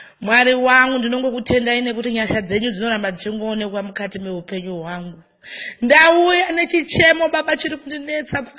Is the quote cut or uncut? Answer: uncut